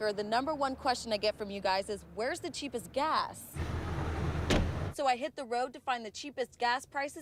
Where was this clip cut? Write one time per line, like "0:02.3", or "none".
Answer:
none